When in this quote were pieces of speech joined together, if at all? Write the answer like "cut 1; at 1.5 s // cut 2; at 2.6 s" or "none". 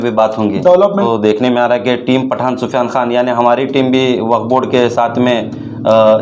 cut 1; at 1.1 s